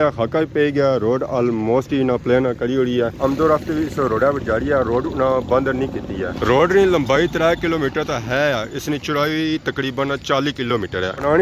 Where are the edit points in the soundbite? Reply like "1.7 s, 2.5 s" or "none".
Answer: none